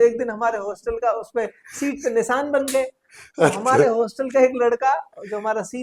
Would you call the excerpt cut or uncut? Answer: uncut